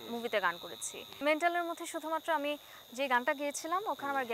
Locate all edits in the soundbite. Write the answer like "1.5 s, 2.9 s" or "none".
1.2 s